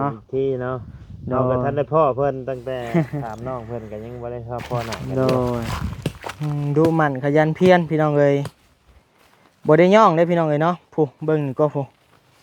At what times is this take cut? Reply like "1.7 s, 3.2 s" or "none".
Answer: 5.8 s